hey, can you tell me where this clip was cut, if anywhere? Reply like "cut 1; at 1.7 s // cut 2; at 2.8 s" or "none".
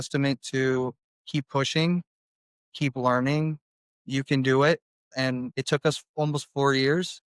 cut 1; at 5.4 s